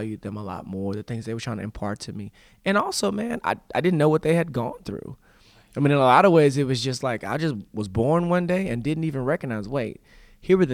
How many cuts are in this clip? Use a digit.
0